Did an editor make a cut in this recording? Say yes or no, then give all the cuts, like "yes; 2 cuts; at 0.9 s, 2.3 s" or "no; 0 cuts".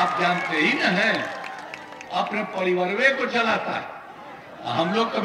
no; 0 cuts